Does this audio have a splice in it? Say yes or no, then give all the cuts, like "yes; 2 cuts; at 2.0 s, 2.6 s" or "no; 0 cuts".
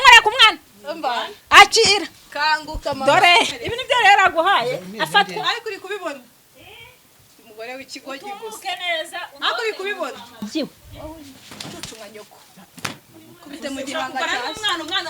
yes; 1 cut; at 3.5 s